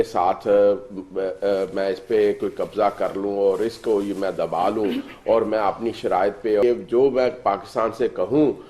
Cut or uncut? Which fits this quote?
cut